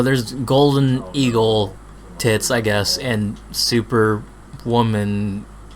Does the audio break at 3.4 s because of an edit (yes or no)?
no